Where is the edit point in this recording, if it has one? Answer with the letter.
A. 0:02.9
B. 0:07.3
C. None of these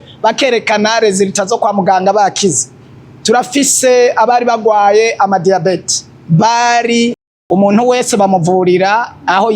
B